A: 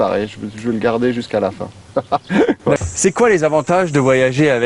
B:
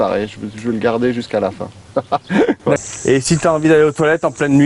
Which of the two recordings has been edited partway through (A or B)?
B